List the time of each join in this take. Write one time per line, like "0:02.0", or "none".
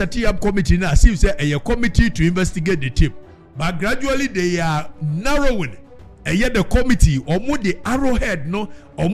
none

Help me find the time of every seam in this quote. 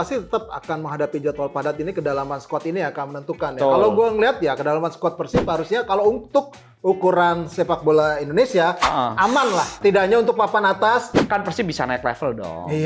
0:09.8
0:11.1

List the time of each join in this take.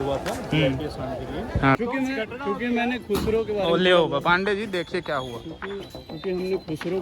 0:01.8

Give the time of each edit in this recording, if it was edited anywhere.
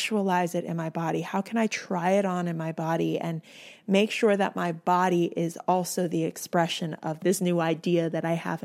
0:07.2

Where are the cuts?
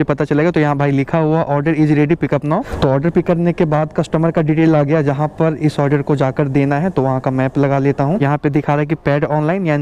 0:02.7
0:08.2

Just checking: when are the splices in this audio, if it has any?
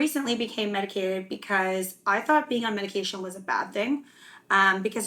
none

